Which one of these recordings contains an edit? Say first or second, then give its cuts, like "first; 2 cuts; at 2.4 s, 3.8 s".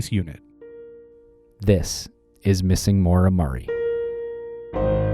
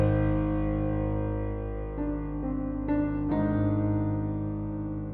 first; 1 cut; at 3.6 s